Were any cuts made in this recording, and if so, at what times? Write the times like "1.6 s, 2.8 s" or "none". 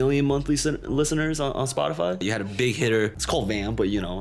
2.2 s, 3.2 s